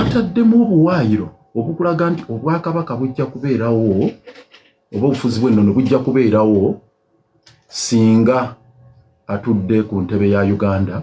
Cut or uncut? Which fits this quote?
uncut